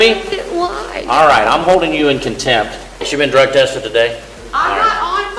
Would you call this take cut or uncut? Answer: cut